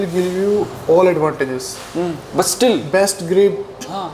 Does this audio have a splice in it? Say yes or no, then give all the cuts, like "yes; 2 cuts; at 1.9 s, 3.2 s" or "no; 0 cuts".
no; 0 cuts